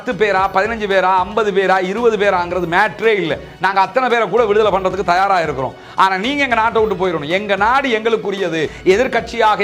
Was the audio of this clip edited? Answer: yes; 1 cut; at 8.7 s

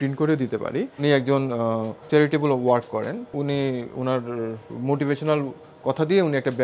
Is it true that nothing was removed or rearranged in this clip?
no; 4 cuts; at 1.0 s, 2.0 s, 3.3 s, 4.7 s

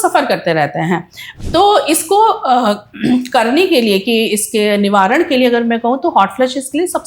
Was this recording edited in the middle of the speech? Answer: yes; 1 cut; at 1.2 s

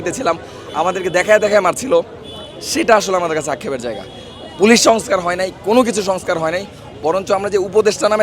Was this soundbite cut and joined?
no; 0 cuts

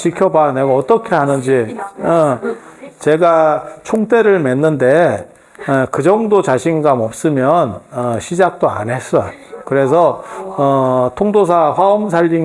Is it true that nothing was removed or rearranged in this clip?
yes; 0 cuts

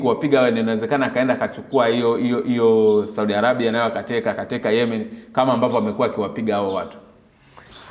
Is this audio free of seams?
yes; 0 cuts

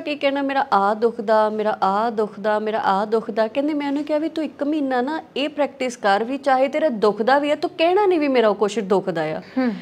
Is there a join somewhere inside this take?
no; 0 cuts

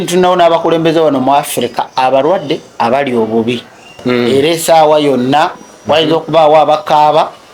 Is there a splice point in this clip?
yes; 1 cut; at 4.3 s

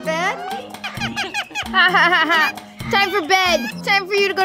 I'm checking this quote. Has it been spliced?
yes; 1 cut; at 1.0 s

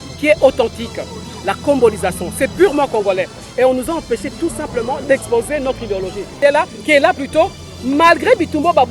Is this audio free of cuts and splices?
no; 1 cut; at 6.4 s

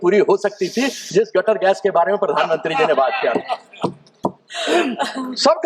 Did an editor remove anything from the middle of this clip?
no; 0 cuts

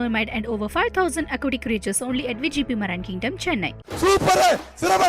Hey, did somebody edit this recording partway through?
yes; 1 cut; at 3.8 s

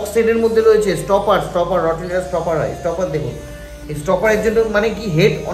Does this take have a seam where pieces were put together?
no; 0 cuts

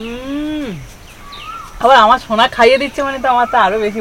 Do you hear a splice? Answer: no; 0 cuts

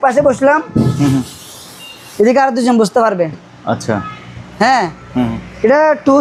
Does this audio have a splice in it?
no; 0 cuts

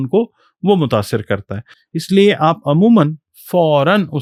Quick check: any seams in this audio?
no; 0 cuts

